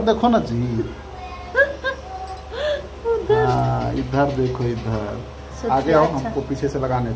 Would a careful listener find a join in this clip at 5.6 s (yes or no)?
yes